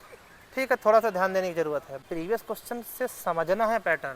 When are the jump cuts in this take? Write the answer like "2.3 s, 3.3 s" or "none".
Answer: 2.0 s